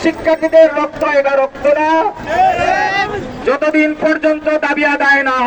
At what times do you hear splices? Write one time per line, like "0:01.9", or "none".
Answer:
0:03.3